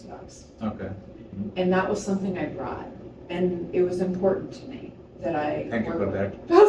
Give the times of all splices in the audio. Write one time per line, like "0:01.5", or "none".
none